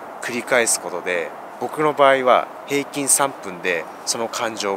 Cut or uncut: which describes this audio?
uncut